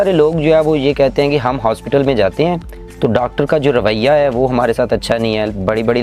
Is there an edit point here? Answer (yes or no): no